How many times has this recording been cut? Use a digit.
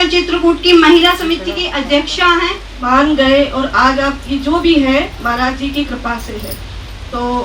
1